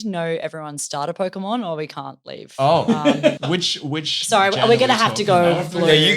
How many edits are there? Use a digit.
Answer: 0